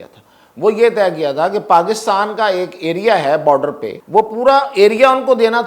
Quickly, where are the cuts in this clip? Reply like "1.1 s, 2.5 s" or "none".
3.9 s